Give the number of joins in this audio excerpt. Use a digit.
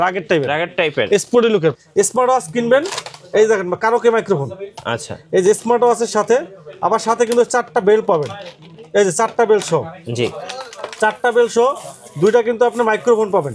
1